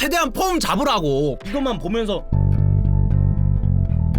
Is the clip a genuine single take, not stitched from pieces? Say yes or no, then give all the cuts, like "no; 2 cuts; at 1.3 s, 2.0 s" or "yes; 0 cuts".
no; 1 cut; at 1.4 s